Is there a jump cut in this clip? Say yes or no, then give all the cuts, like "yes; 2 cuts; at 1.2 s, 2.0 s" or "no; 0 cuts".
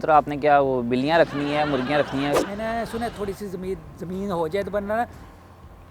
yes; 1 cut; at 2.4 s